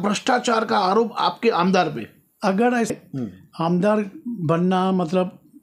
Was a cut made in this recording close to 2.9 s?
yes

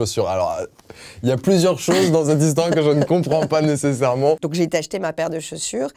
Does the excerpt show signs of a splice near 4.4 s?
yes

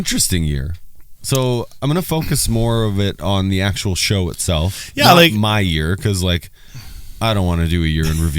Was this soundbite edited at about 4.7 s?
no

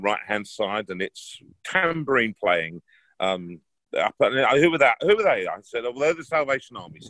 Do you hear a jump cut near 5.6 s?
no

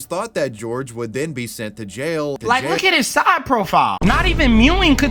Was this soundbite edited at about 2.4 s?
yes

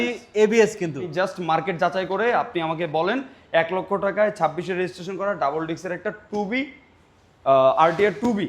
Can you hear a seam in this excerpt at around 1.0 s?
yes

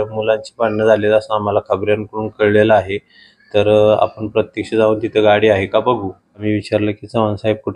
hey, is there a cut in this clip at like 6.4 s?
yes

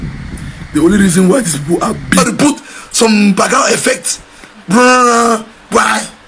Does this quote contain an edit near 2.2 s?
yes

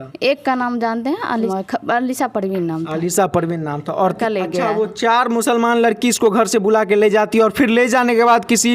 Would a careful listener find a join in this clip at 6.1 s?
no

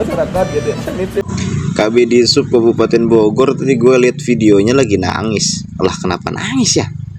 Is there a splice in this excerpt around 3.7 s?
no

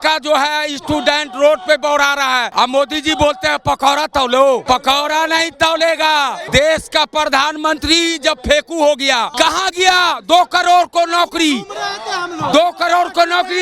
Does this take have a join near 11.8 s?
no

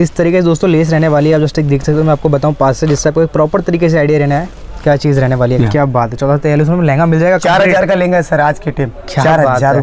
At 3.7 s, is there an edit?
no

